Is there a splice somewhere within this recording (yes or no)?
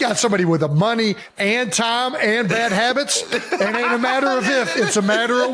no